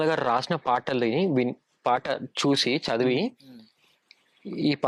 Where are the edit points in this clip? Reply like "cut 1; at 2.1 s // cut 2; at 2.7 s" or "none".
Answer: none

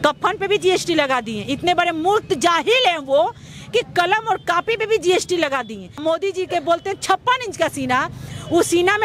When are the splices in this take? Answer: cut 1; at 5.9 s

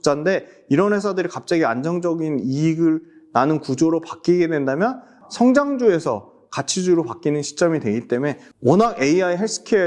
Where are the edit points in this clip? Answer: cut 1; at 5.2 s // cut 2; at 8.4 s

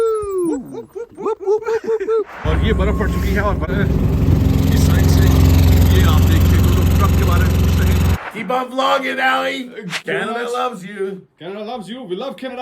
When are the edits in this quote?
cut 1; at 2.4 s // cut 2; at 3.7 s // cut 3; at 8.2 s // cut 4; at 9.9 s

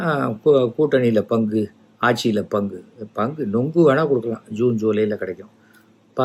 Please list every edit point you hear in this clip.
none

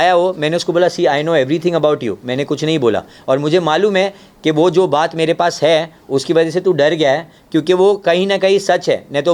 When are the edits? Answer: none

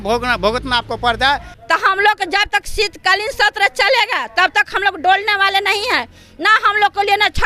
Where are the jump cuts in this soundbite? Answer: cut 1; at 1.5 s

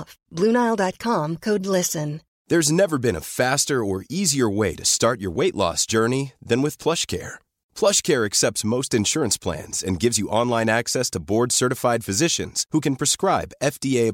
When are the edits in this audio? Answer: cut 1; at 2.3 s

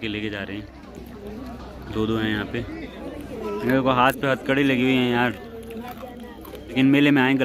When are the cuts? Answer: cut 1; at 3.4 s // cut 2; at 6.7 s

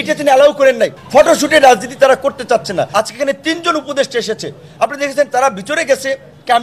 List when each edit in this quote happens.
cut 1; at 1.0 s // cut 2; at 2.9 s

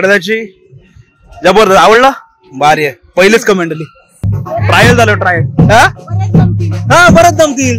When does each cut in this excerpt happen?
cut 1; at 4.2 s

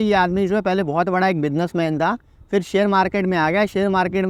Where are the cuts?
none

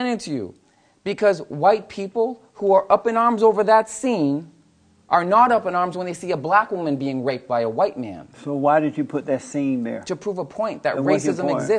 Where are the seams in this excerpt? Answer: none

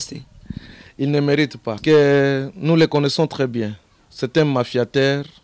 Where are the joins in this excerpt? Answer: cut 1; at 1.7 s

